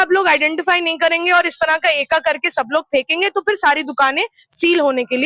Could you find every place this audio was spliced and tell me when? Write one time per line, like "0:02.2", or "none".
none